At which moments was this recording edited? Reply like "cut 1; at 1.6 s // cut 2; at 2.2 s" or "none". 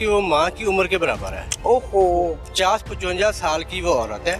none